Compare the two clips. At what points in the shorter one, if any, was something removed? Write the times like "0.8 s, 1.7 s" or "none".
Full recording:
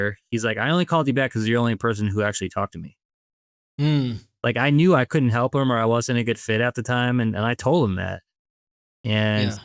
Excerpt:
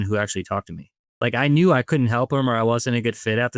1.0 s